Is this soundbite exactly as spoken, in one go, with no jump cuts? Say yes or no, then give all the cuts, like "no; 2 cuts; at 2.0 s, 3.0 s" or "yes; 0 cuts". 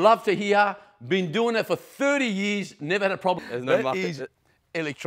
no; 1 cut; at 3.4 s